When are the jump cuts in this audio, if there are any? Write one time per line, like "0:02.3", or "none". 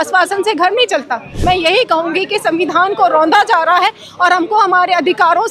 0:01.3